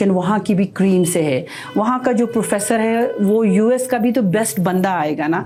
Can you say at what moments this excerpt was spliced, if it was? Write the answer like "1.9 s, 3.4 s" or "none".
none